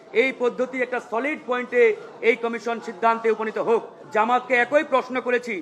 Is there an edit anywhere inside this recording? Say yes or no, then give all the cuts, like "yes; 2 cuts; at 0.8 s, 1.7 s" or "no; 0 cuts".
yes; 1 cut; at 4.0 s